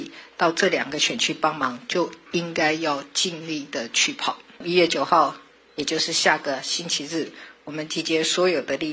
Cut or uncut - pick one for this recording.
cut